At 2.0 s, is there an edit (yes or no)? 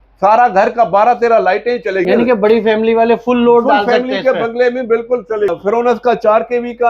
yes